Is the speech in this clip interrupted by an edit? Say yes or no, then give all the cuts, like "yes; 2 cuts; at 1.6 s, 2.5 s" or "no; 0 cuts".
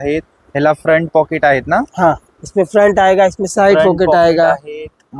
no; 0 cuts